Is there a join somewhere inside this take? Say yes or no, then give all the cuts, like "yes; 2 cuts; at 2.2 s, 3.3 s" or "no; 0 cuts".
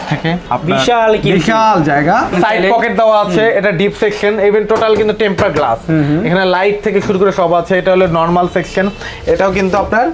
yes; 1 cut; at 2.3 s